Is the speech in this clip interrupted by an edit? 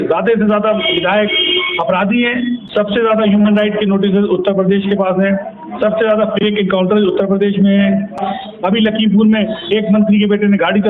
yes; 2 cuts; at 2.6 s, 8.2 s

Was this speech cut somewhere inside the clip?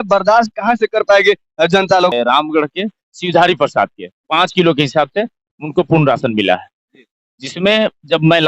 yes; 1 cut; at 2.1 s

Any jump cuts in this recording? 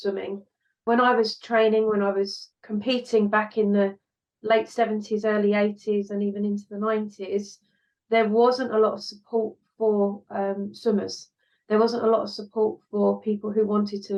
no; 0 cuts

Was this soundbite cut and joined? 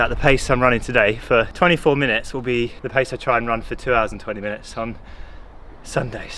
yes; 2 cuts; at 1.5 s, 2.8 s

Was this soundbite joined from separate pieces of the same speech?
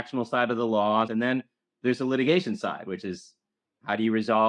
yes; 1 cut; at 1.1 s

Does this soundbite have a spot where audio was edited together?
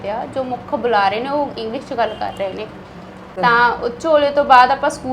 yes; 1 cut; at 3.3 s

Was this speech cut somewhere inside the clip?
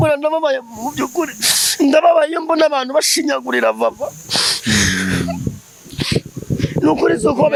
no; 0 cuts

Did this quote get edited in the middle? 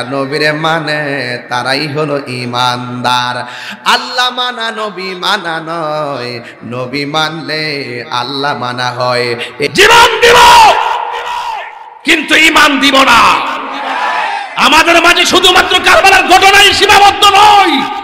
yes; 1 cut; at 9.7 s

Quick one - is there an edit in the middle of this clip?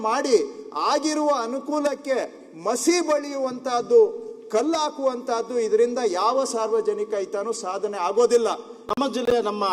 yes; 1 cut; at 8.8 s

